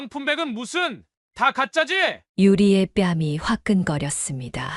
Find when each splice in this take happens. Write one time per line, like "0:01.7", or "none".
none